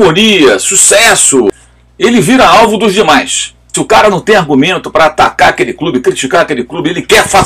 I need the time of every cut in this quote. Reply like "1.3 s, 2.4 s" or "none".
1.5 s, 3.7 s